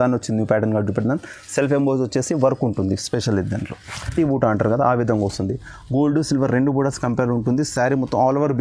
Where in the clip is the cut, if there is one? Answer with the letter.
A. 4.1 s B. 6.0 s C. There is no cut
A